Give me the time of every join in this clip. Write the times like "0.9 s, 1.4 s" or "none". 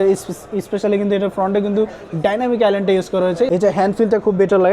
3.5 s